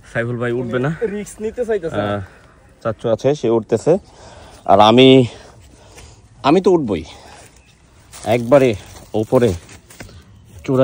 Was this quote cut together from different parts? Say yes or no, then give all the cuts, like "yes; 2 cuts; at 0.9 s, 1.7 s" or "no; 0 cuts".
no; 0 cuts